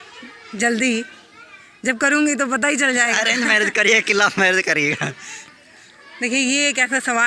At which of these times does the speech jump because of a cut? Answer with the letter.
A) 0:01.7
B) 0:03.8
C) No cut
C